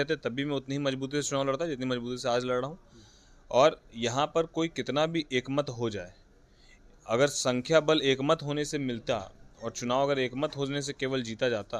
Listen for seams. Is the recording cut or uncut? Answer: uncut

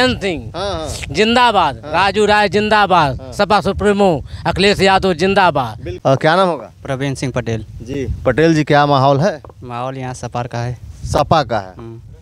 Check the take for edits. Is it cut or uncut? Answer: uncut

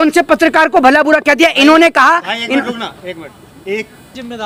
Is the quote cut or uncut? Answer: uncut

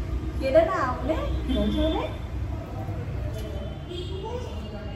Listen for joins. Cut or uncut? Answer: uncut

